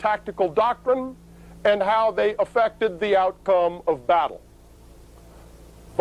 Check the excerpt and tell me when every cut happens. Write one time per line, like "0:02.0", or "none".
0:01.7